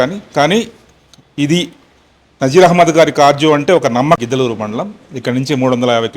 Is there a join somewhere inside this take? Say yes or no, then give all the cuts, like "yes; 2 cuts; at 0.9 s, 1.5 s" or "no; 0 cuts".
yes; 1 cut; at 4.2 s